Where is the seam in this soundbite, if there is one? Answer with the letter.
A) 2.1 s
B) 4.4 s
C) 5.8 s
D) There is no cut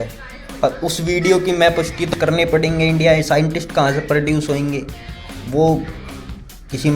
A